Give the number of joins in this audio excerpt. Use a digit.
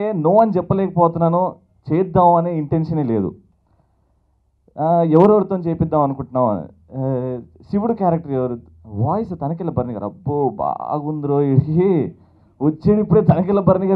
0